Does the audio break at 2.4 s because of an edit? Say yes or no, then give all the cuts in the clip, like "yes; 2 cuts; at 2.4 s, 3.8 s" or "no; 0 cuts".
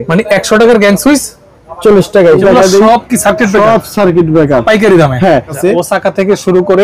yes; 2 cuts; at 2.4 s, 5.6 s